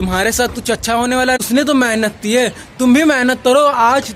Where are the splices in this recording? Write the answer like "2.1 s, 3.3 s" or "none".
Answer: 1.4 s